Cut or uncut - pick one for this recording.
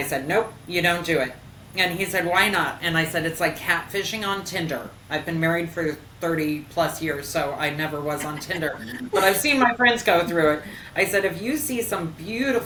uncut